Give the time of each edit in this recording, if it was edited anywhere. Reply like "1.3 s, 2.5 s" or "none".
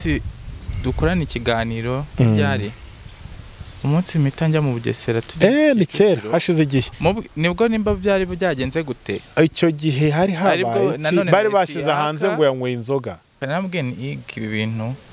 13.4 s